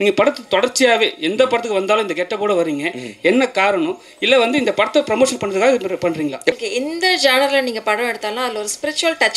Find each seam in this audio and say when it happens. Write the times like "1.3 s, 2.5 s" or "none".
6.5 s